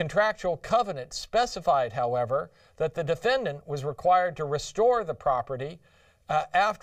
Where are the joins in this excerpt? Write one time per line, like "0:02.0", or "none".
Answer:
0:03.9